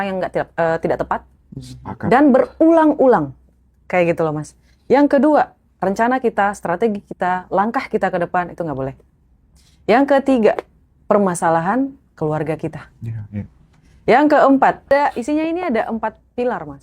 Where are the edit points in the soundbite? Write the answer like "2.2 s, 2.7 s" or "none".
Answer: 14.9 s